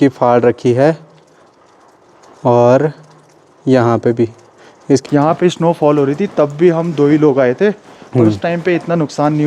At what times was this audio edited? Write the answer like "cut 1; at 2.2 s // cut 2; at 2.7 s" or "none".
cut 1; at 5.0 s

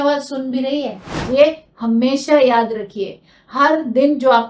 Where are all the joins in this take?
cut 1; at 1.2 s

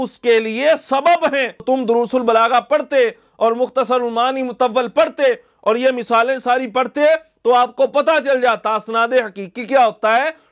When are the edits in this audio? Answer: cut 1; at 1.6 s

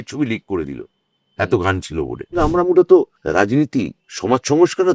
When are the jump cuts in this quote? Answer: cut 1; at 2.4 s // cut 2; at 3.5 s

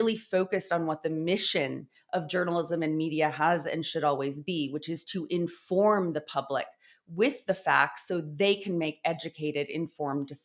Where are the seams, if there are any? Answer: none

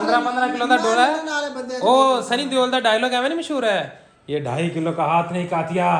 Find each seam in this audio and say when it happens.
none

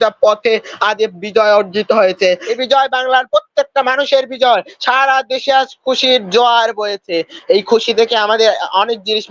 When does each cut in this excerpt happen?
cut 1; at 2.6 s

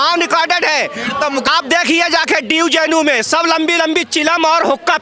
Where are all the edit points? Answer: cut 1; at 1.4 s

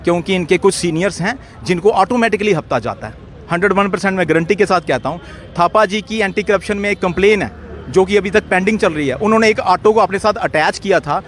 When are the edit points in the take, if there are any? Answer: none

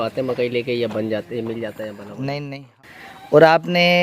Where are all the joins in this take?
cut 1; at 2.7 s

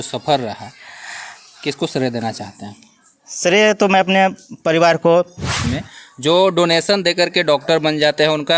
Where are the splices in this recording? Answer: cut 1; at 5.7 s

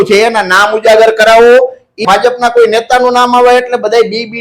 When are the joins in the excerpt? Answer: cut 1; at 2.0 s

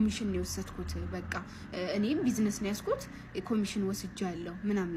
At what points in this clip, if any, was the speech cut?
none

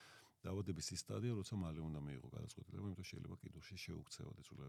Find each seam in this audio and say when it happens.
none

